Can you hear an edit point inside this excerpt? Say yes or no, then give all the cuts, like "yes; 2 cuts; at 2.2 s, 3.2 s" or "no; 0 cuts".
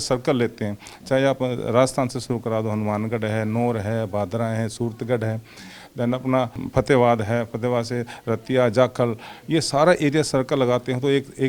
yes; 1 cut; at 6.6 s